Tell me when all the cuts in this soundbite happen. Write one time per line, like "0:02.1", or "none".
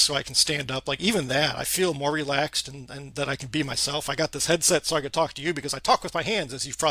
none